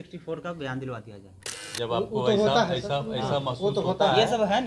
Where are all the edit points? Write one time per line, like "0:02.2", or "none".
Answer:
0:01.7